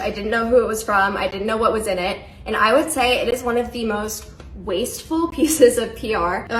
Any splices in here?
no; 0 cuts

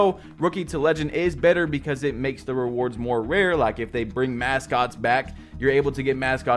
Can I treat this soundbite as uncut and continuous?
yes; 0 cuts

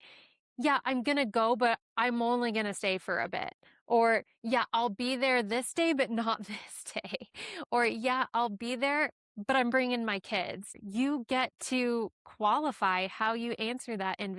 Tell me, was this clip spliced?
yes; 1 cut; at 10.8 s

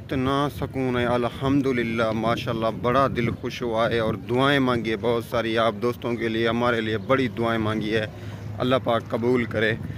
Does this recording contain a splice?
no; 0 cuts

